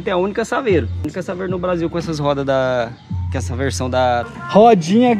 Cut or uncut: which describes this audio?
cut